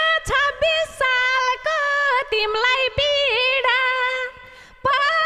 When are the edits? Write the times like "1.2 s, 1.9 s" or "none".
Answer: none